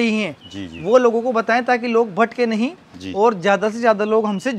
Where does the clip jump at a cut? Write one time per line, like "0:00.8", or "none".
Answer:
none